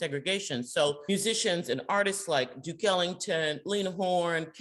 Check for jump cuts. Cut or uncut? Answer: cut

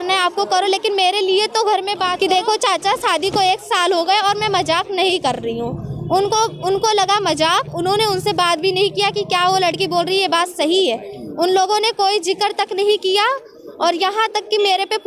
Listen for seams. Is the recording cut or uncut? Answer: cut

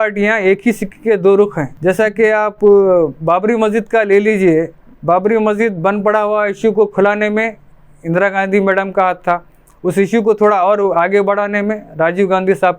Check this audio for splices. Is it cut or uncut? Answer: uncut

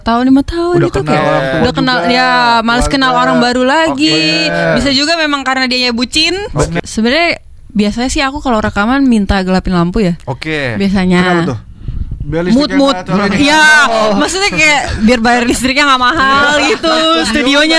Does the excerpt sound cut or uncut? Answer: cut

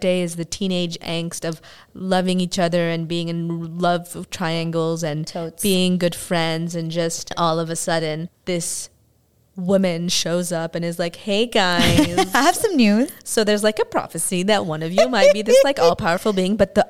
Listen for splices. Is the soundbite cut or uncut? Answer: uncut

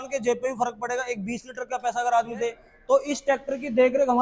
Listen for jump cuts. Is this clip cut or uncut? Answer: cut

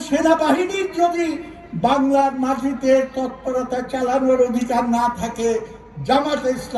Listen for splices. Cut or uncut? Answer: uncut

